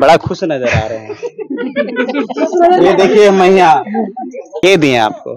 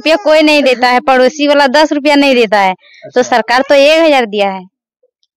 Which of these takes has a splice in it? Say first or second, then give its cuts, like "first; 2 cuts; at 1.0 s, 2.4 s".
first; 1 cut; at 4.5 s